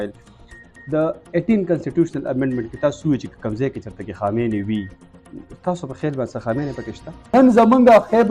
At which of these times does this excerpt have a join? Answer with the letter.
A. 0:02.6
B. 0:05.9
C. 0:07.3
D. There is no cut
C